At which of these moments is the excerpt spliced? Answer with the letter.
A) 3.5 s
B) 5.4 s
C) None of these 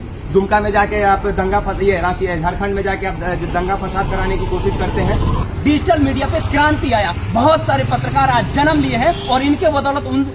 B